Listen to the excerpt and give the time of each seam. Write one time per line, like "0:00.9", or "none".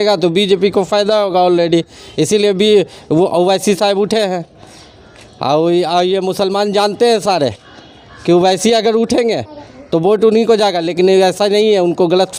none